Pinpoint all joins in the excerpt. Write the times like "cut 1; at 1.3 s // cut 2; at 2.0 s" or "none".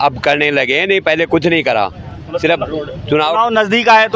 none